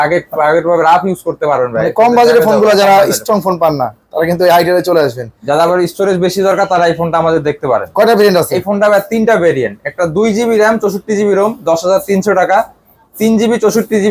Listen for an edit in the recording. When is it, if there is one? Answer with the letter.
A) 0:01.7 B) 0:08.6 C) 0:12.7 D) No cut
D